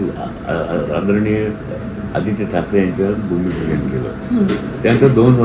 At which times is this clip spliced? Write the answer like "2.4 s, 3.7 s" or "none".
none